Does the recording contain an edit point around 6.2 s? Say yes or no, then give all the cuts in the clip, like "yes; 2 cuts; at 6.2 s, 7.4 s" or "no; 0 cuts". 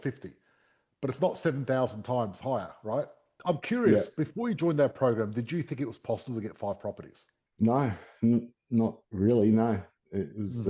no; 1 cut; at 3.4 s